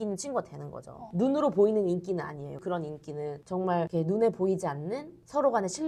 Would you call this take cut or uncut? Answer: uncut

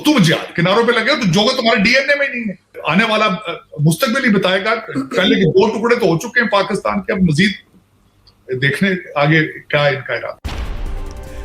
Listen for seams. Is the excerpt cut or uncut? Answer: uncut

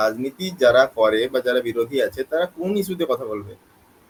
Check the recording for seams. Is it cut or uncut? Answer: uncut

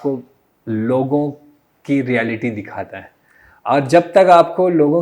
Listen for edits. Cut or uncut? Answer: uncut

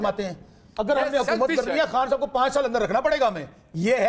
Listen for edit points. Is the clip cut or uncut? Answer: uncut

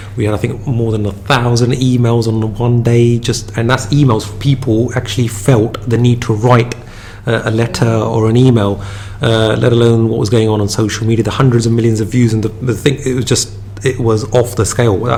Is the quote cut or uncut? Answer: uncut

